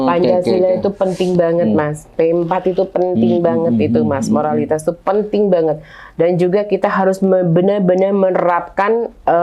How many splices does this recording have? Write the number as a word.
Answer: zero